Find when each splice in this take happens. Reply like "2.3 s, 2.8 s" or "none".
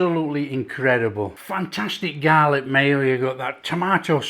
1.4 s